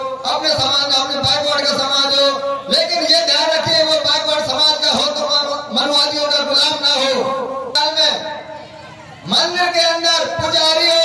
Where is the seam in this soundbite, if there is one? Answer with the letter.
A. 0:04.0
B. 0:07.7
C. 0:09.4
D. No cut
B